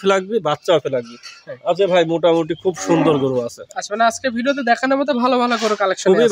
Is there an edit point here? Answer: no; 0 cuts

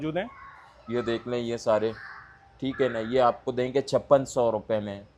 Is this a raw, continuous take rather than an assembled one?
yes; 0 cuts

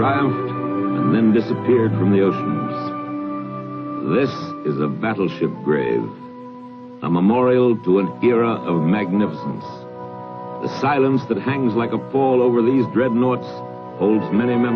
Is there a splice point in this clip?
yes; 1 cut; at 9.2 s

